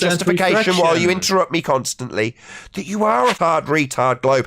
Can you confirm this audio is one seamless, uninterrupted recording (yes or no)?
no